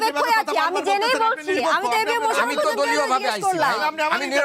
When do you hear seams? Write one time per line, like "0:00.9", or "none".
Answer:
none